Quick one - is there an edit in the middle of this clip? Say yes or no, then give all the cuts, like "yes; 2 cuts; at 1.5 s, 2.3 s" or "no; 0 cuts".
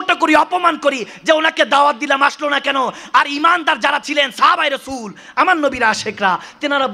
no; 0 cuts